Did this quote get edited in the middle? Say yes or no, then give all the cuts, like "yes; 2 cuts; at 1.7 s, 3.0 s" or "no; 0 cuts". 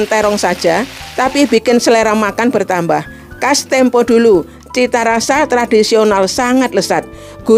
no; 0 cuts